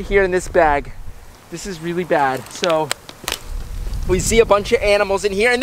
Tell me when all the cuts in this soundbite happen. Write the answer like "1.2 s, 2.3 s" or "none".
none